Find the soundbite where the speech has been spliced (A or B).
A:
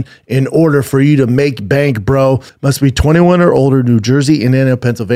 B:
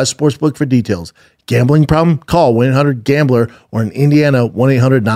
A